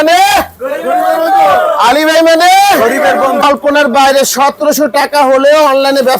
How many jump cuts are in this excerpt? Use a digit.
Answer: 1